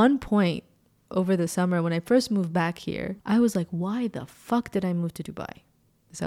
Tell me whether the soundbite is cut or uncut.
uncut